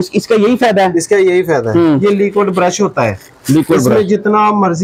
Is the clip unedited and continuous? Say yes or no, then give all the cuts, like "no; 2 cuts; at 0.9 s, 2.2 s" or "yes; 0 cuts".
no; 1 cut; at 1.7 s